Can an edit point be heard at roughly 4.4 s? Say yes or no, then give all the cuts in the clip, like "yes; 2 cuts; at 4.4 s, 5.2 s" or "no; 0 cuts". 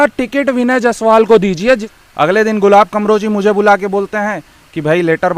no; 1 cut; at 1.9 s